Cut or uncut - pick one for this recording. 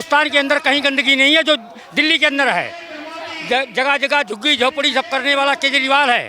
uncut